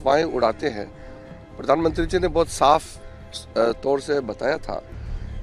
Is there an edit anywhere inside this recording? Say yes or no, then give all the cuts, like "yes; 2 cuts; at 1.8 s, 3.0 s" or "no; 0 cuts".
no; 0 cuts